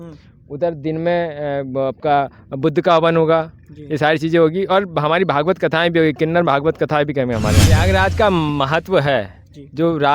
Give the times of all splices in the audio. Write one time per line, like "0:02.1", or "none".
0:07.8